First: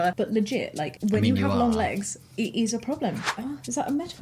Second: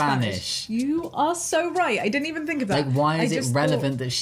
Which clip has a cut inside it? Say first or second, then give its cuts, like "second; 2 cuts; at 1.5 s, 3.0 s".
first; 1 cut; at 3.3 s